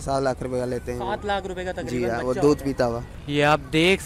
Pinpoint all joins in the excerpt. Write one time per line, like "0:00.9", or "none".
0:03.1